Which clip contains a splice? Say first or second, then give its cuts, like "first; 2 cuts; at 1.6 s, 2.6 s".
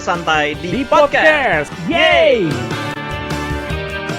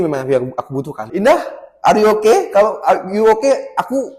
second; 1 cut; at 1.0 s